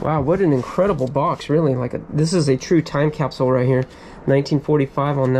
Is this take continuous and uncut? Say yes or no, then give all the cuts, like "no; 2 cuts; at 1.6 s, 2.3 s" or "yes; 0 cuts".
yes; 0 cuts